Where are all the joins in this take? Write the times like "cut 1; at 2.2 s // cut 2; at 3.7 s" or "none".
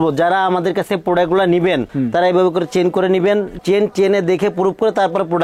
cut 1; at 3.6 s